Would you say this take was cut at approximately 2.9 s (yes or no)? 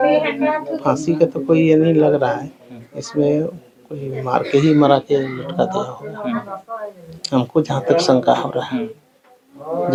no